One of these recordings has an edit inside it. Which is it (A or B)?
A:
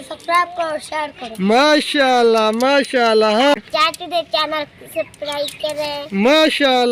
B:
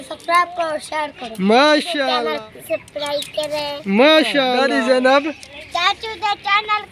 B